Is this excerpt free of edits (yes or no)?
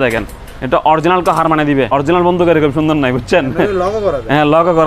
no